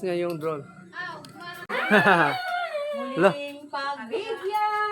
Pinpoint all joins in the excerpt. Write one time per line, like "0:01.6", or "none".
0:01.8